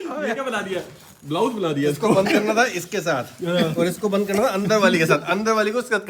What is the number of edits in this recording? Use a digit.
0